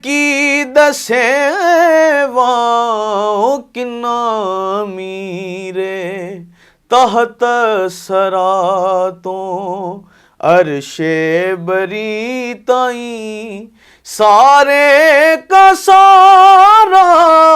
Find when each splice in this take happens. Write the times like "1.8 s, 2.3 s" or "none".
none